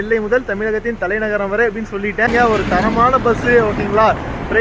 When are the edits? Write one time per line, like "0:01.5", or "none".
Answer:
0:02.3